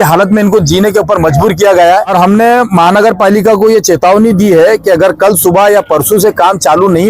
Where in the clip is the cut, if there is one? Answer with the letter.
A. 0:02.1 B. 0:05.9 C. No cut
A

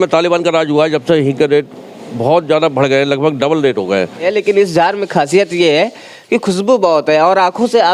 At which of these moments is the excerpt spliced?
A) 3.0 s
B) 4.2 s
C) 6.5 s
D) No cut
B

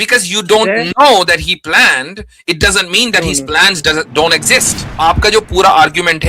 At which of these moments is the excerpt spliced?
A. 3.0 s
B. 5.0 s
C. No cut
B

